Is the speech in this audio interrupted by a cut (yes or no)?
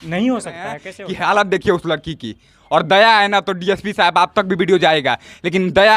yes